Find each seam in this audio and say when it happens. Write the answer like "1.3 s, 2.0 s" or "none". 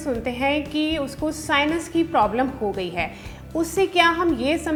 none